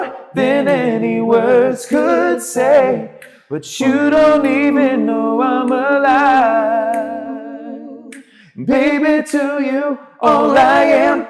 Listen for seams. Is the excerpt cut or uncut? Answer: uncut